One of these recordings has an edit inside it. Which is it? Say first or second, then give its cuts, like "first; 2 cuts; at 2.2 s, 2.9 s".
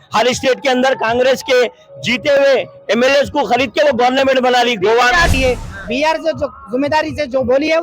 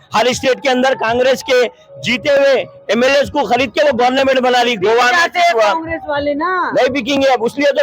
first; 1 cut; at 5.3 s